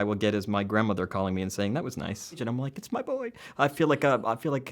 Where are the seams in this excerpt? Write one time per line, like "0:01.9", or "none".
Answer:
0:02.4